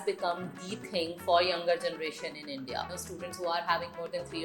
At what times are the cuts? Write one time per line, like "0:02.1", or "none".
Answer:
0:03.0